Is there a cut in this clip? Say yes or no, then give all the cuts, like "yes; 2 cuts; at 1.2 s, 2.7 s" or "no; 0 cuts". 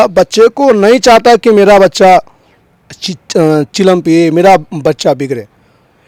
no; 0 cuts